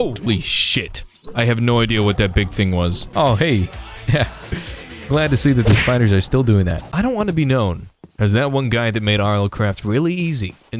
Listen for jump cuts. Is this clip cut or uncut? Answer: cut